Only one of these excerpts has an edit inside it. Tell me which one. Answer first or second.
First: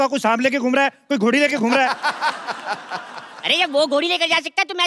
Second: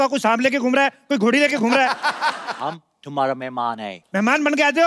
second